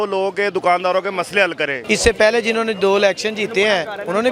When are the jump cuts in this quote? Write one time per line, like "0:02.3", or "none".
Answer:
0:01.8